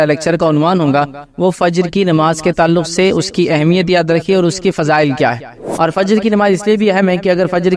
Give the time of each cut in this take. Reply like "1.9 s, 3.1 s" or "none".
5.7 s